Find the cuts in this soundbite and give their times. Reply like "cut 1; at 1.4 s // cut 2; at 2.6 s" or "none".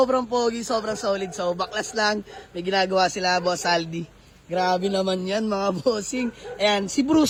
none